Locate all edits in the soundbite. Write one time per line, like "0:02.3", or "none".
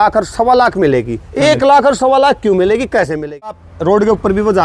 0:03.7